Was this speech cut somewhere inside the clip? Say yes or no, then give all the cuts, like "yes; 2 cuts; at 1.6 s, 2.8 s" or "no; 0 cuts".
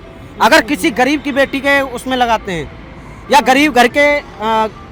no; 0 cuts